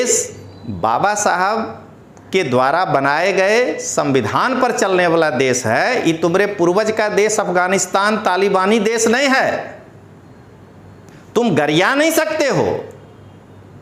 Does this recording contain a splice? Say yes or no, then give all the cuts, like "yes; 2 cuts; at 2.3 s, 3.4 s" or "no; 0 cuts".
no; 0 cuts